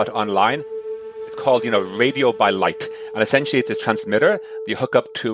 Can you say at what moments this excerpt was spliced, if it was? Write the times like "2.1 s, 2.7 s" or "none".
1.0 s